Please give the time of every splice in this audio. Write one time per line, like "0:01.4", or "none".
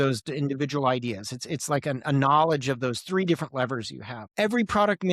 0:04.2